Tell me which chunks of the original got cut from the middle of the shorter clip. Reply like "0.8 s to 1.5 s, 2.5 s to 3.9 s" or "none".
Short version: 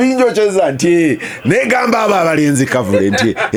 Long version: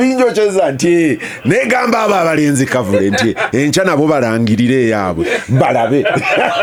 none

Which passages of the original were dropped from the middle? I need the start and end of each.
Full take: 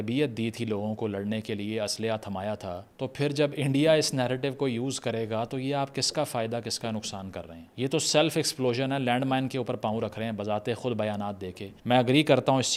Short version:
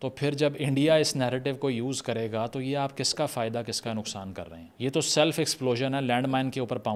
none

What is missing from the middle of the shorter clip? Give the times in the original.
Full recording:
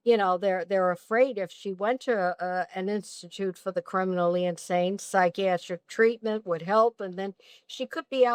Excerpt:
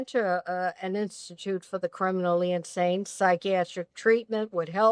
none

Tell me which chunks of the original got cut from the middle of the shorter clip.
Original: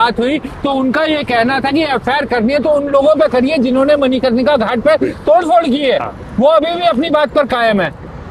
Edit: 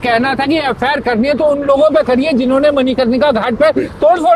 none

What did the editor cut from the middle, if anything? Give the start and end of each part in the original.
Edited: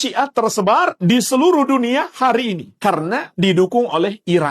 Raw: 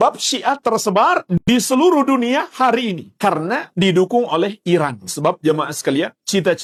1.4 s to 1.5 s

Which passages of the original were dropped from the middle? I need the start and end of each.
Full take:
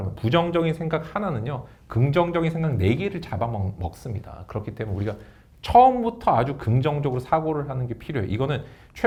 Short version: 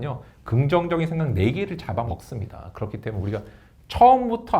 3.5 s to 3.8 s

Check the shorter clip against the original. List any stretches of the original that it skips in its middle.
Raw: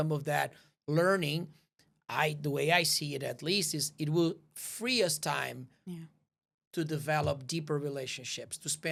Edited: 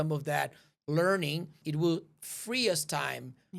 1.6 s to 3.9 s

